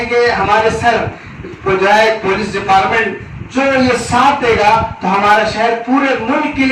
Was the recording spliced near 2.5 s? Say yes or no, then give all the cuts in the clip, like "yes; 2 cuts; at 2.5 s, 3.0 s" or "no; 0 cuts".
no; 0 cuts